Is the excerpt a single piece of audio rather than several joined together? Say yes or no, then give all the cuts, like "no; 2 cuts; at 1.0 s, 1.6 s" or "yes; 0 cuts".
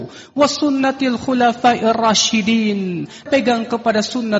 no; 1 cut; at 3.3 s